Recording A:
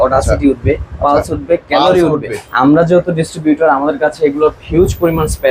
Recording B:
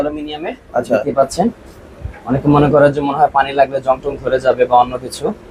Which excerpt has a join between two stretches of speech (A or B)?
A